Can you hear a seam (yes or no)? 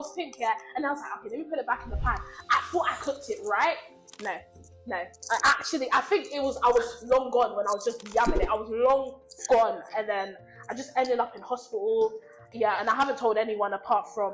yes